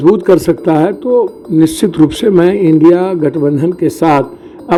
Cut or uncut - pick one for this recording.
uncut